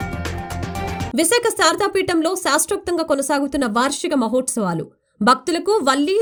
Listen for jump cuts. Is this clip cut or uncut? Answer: uncut